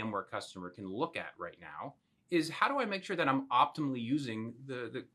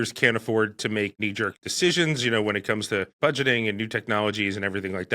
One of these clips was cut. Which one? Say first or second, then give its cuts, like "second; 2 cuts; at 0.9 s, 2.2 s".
second; 1 cut; at 1.4 s